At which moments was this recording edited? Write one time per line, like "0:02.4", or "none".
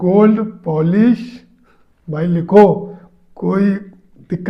none